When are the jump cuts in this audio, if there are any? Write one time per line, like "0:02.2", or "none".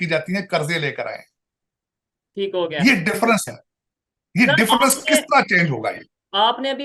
none